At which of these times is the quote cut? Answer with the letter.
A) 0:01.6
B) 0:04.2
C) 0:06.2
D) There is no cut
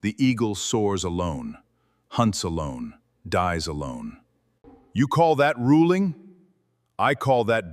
D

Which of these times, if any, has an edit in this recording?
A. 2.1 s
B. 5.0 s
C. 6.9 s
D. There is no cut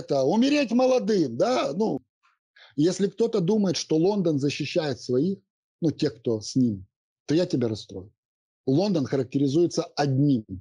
A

